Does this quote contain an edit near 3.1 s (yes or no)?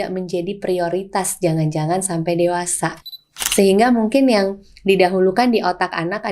yes